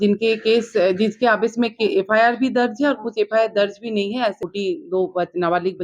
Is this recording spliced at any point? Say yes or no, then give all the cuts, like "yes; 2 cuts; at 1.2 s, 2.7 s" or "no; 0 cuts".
yes; 1 cut; at 4.4 s